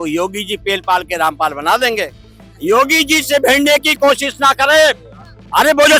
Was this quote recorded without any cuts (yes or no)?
yes